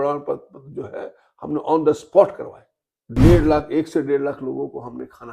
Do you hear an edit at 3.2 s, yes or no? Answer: yes